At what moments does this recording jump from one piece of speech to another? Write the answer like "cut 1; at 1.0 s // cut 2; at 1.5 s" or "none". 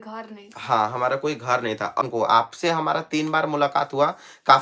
cut 1; at 2.0 s